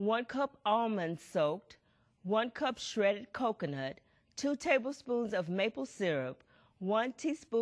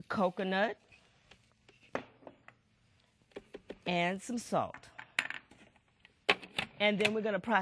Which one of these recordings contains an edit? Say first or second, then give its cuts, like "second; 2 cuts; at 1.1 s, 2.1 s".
first; 1 cut; at 3.4 s